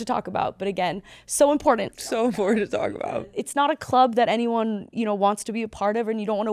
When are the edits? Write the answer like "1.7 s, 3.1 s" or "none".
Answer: 3.3 s